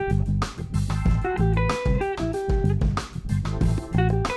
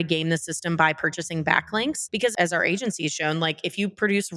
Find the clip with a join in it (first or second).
second